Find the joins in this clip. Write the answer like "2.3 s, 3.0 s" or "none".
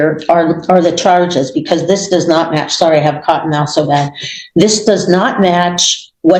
none